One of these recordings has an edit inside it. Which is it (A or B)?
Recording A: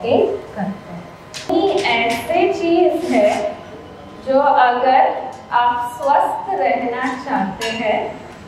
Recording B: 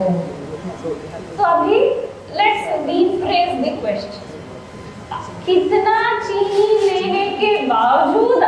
A